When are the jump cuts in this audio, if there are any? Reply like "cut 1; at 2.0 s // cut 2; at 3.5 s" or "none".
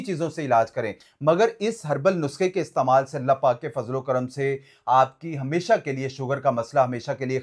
cut 1; at 1.0 s